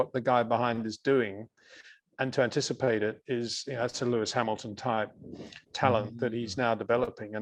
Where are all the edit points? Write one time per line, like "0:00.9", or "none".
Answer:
none